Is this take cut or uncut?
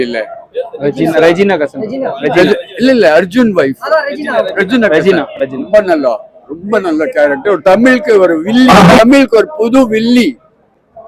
uncut